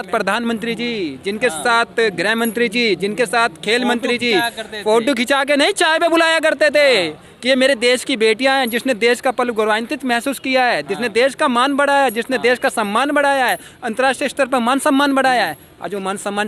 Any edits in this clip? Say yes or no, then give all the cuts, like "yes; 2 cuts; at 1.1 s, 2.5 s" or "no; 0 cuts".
no; 0 cuts